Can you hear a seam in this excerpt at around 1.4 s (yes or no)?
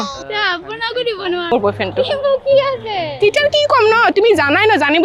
yes